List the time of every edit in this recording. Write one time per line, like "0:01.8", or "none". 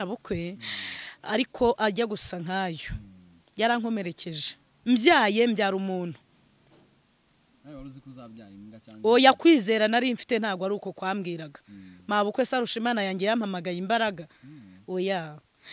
none